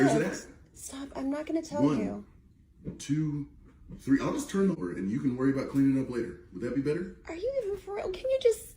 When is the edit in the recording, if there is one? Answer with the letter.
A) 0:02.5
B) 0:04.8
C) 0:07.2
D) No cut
B